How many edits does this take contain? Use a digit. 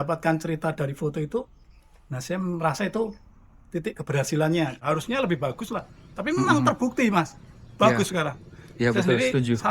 1